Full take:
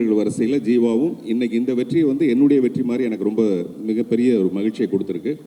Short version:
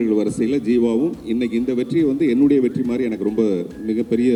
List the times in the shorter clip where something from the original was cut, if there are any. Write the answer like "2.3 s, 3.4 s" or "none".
none